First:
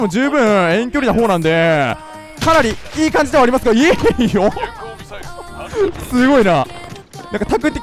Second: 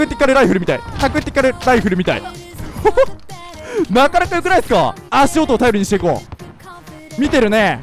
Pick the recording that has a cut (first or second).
second